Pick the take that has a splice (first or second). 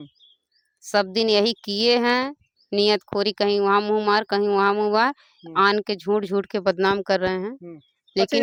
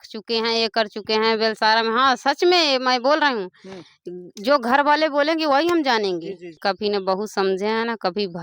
second